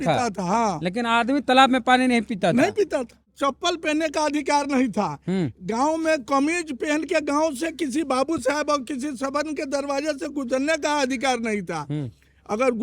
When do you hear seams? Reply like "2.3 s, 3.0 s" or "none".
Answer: 3.3 s